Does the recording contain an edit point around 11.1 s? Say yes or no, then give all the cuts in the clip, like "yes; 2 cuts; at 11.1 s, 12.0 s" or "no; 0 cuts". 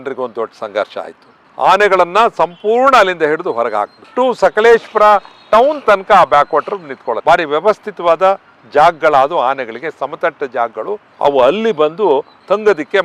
yes; 4 cuts; at 1.3 s, 4.0 s, 7.2 s, 11.1 s